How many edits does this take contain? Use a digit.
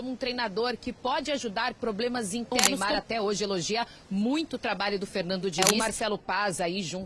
2